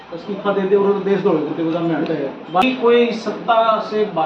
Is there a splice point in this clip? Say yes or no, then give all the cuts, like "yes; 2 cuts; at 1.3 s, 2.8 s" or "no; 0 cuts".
yes; 1 cut; at 2.6 s